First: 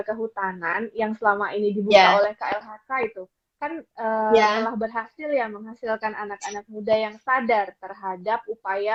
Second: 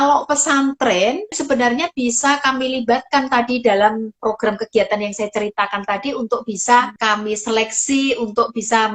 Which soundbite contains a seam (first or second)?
second